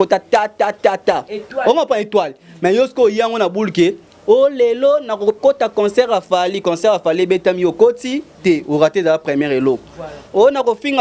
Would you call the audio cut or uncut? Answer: uncut